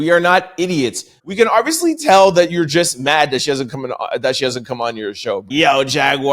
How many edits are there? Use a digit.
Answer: 2